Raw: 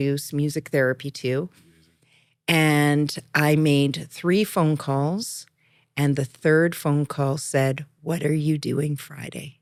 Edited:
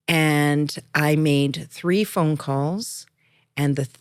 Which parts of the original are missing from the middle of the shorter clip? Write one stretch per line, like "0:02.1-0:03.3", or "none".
none